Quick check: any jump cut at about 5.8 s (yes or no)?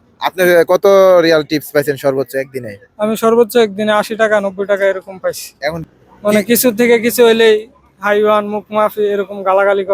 yes